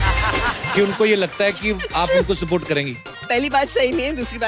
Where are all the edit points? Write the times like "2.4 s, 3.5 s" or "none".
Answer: 3.1 s